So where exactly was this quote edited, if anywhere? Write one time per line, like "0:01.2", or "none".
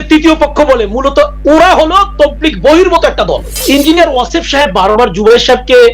0:03.5